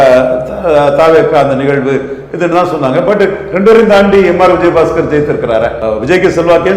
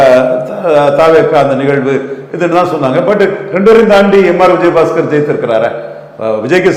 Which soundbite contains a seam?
first; 1 cut; at 5.8 s

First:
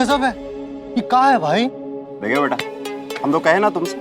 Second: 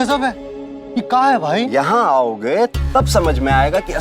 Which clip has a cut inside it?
second; 1 cut; at 1.7 s

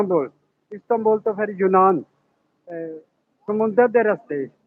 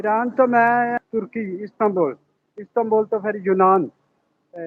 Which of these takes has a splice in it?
second; 1 cut; at 1.0 s

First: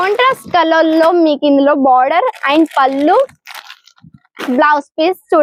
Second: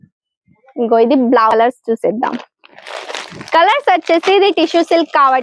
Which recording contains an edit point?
second; 1 cut; at 1.5 s

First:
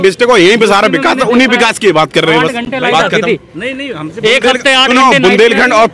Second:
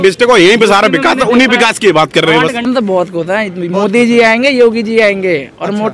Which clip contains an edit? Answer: second; 1 cut; at 2.7 s

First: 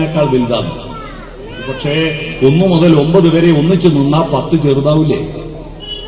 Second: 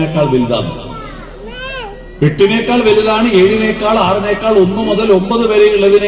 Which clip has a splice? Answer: first; 1 cut; at 1.7 s

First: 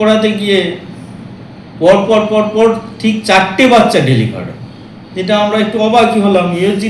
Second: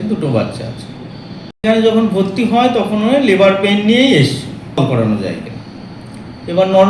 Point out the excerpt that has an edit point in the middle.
second; 2 cuts; at 1.6 s, 4.8 s

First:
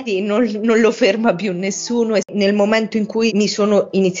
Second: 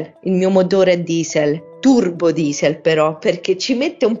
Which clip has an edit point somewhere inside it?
first; 1 cut; at 2.3 s

